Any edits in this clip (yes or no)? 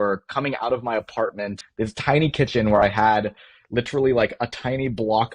yes